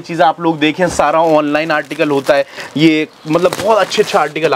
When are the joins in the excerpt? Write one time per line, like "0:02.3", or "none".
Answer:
none